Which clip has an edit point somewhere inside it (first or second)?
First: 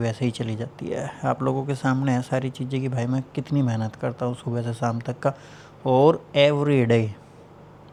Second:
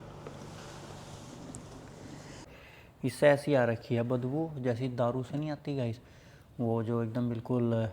second